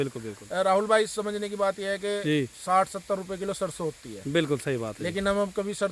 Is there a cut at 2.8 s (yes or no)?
no